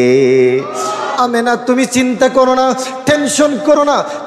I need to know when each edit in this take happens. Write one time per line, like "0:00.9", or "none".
0:01.1